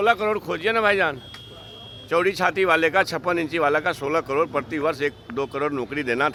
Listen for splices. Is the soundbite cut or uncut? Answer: uncut